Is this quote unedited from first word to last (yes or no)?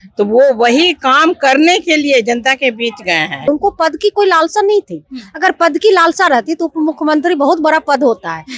no